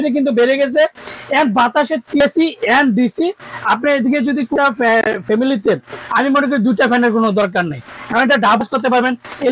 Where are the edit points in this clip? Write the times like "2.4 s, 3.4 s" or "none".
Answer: 2.2 s, 4.5 s, 8.6 s